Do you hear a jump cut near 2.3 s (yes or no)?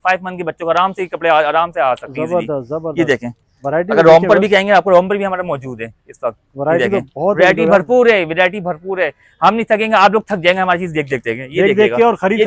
no